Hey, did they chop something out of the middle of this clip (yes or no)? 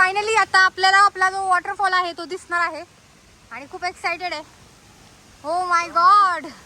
no